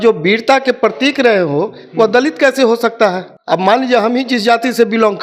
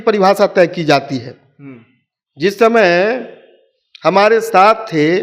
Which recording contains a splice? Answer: first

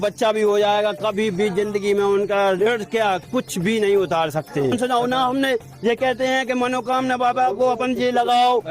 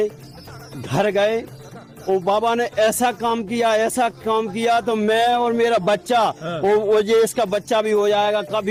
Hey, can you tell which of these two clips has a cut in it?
first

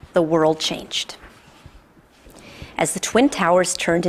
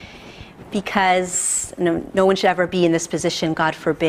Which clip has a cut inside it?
second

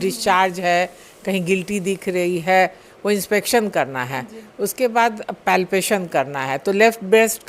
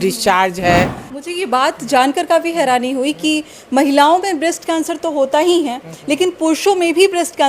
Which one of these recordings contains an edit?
second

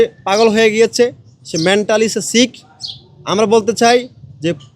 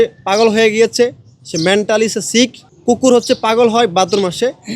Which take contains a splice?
second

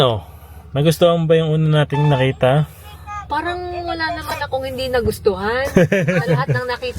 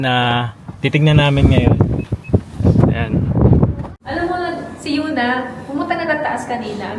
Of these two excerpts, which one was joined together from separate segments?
second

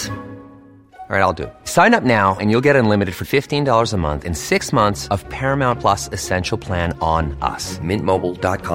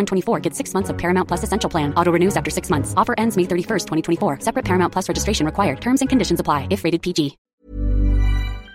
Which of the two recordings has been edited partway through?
second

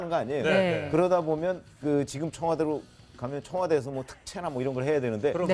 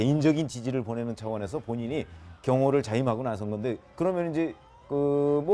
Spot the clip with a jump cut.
first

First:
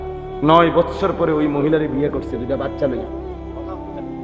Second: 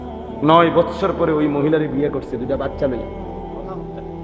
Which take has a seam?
second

